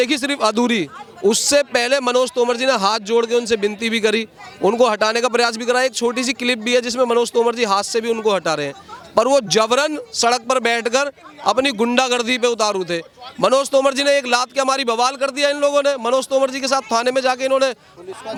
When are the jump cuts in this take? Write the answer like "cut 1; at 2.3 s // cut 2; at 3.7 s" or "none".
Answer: none